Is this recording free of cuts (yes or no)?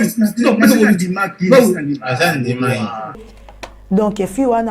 no